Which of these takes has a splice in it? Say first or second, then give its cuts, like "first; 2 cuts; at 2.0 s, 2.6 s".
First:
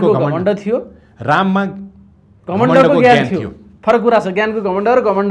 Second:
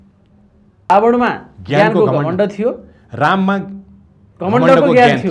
second; 1 cut; at 0.9 s